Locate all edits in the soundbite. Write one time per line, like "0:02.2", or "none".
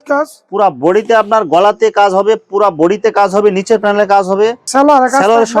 0:04.7